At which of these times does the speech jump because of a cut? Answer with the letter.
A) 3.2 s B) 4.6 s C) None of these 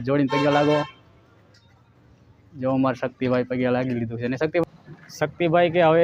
B